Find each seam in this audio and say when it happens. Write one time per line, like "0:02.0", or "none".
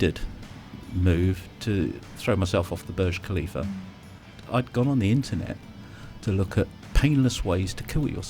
0:04.4